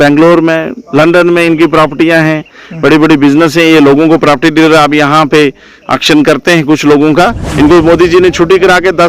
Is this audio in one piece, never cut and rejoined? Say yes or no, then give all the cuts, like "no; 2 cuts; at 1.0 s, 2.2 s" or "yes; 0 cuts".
no; 1 cut; at 7.4 s